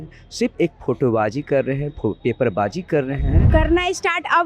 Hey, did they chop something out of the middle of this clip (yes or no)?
yes